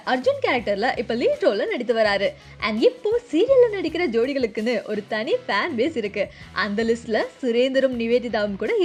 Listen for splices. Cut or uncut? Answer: uncut